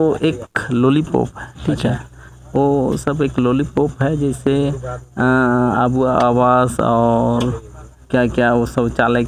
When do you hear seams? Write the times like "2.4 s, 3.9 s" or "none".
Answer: none